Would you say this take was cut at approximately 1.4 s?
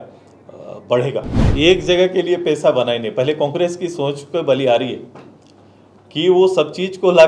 yes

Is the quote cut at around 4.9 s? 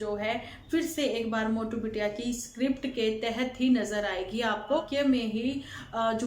yes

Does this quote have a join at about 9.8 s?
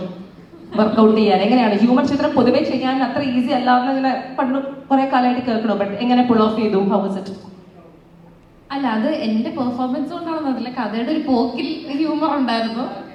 no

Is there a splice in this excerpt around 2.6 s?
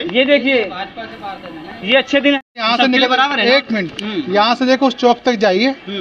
yes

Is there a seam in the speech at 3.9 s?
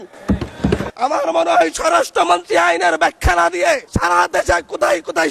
yes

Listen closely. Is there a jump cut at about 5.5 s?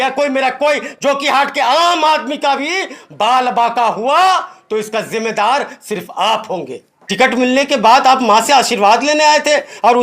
no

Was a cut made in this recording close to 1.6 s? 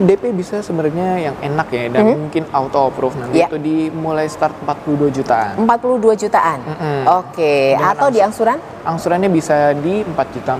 no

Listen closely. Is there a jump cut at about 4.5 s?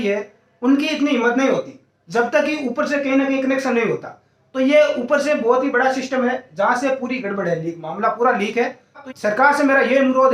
no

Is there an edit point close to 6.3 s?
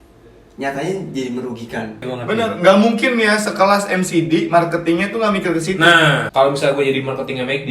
yes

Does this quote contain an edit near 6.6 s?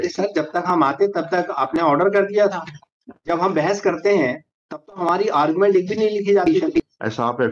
yes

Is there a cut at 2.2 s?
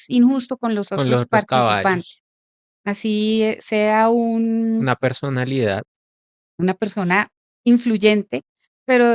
no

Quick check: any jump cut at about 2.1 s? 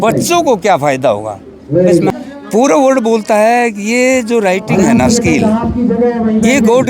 yes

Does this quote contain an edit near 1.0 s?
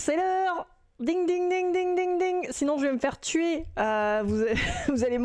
no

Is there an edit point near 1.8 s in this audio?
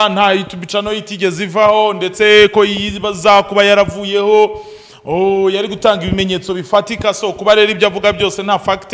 no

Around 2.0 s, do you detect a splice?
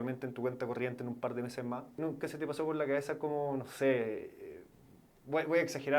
yes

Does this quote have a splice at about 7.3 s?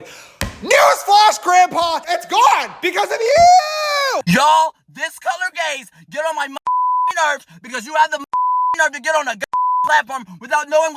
no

